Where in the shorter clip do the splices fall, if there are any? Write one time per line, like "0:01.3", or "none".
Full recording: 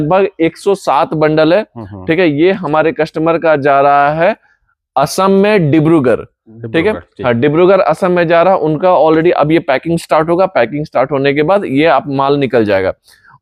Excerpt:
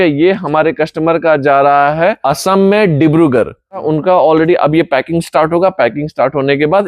0:02.2
0:03.8